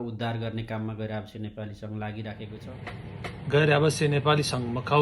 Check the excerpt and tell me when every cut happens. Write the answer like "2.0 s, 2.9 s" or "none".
2.6 s